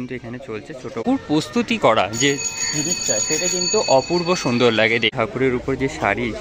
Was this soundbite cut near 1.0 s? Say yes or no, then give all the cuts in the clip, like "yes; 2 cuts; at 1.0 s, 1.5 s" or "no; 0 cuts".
yes; 2 cuts; at 1.0 s, 5.1 s